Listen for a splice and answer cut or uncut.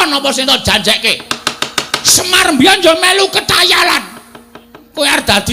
cut